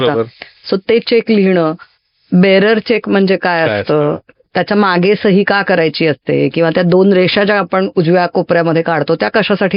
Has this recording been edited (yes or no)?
no